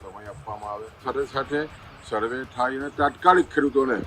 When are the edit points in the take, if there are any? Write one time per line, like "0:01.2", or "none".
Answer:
0:01.0